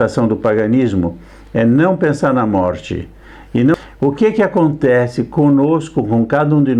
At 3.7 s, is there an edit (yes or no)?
yes